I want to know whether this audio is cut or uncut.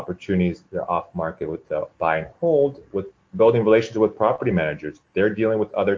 cut